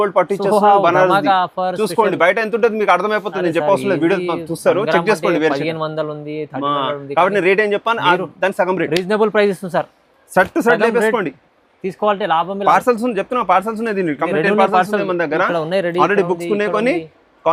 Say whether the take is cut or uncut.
uncut